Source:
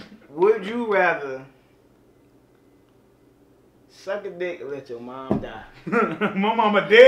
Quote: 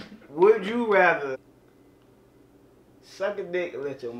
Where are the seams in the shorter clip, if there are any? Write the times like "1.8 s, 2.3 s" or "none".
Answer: 1.4 s